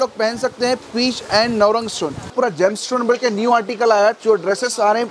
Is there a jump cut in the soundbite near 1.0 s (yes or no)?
no